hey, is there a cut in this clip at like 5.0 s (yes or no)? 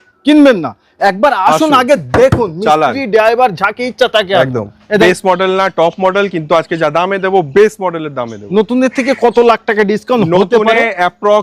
yes